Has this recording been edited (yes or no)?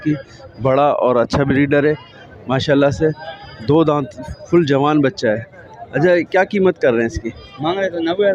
no